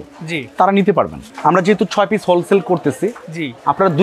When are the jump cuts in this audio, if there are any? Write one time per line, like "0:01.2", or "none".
0:01.2

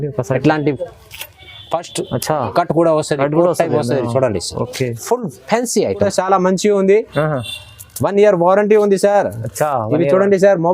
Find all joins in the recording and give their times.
0:06.1

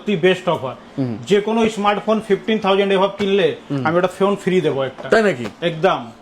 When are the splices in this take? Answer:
none

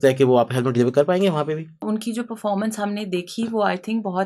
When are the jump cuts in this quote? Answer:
0:01.8

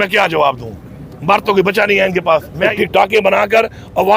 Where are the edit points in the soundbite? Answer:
0:02.7

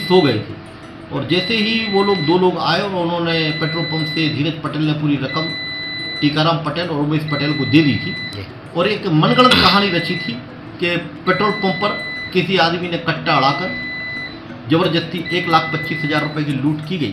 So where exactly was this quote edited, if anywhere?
none

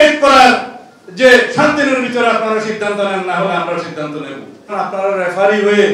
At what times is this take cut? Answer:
0:04.7

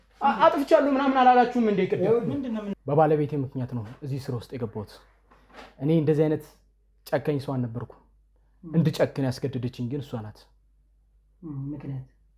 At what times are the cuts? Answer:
0:02.7

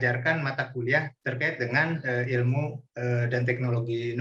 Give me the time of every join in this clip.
0:01.2
0:02.8

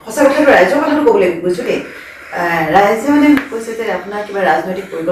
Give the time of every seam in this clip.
none

